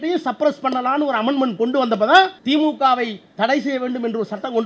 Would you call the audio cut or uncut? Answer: cut